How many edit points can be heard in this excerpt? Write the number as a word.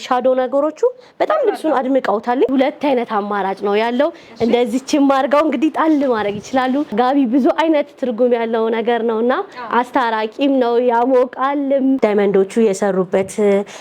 three